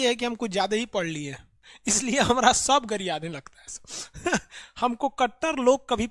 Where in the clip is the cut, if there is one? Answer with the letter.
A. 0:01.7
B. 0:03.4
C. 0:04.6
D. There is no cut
A